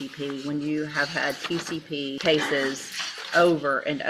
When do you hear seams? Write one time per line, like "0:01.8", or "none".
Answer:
0:02.2